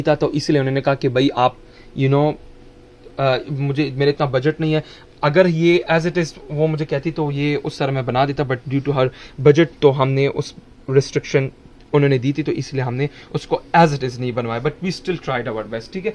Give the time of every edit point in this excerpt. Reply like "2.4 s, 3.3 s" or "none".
none